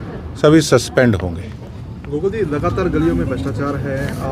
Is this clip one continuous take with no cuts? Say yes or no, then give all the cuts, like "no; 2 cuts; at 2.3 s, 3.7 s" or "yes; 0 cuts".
yes; 0 cuts